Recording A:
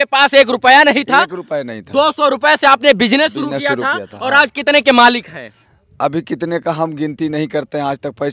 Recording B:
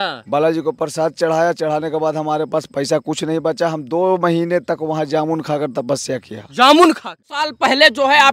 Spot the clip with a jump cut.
B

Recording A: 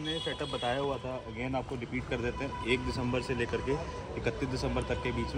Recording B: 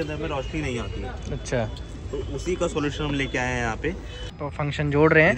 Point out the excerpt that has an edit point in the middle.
B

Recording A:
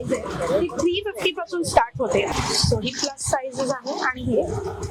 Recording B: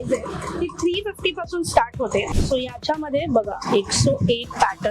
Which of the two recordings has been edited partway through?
B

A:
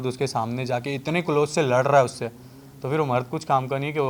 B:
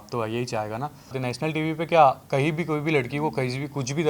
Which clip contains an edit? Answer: B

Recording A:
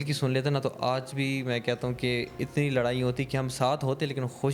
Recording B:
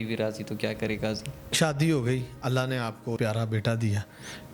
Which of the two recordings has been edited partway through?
B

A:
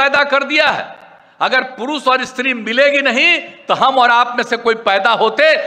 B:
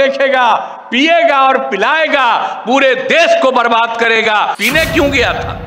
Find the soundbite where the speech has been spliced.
B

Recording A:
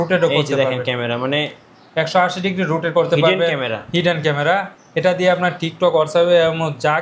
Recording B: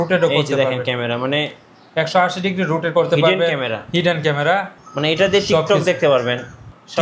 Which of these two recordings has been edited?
B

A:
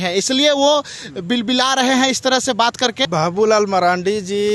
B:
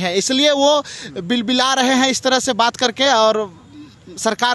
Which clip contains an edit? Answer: A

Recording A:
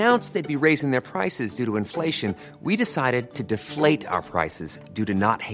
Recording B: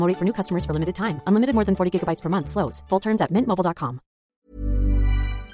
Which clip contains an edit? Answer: B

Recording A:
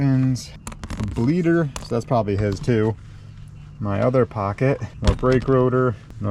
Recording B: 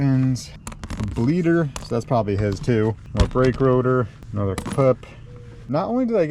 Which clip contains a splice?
B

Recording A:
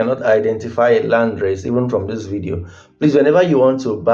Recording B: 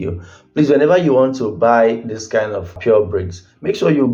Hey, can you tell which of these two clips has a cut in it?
B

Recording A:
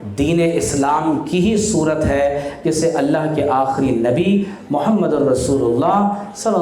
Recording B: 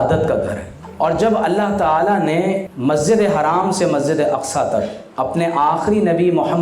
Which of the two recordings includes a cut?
B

